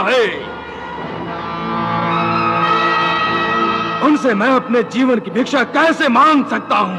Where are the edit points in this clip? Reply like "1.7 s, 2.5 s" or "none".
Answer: none